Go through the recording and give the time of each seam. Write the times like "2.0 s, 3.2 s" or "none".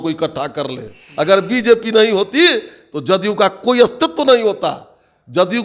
1.0 s